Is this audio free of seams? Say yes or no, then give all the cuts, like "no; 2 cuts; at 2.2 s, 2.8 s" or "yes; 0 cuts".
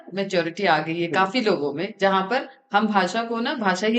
yes; 0 cuts